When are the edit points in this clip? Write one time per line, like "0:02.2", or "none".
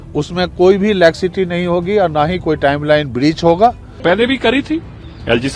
0:03.9